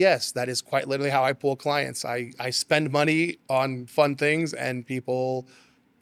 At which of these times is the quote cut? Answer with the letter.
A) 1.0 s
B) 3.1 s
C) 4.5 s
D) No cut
D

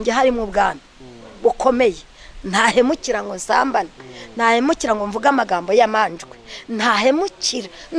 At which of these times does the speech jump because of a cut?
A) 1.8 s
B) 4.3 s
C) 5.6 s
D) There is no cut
D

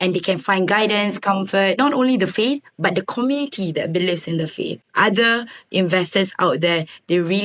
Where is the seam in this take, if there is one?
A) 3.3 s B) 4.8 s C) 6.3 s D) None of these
B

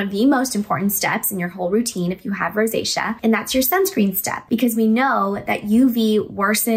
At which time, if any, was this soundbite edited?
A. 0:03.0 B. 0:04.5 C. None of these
C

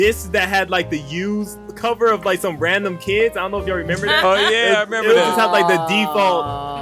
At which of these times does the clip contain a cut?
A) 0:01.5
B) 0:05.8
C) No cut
A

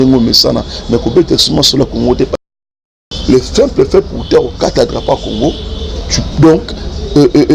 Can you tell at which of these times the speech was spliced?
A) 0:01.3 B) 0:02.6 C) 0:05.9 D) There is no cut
B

